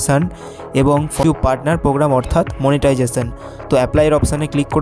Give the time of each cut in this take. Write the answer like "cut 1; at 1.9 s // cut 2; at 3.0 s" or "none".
cut 1; at 1.2 s